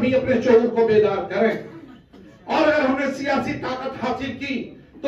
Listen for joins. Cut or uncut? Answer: uncut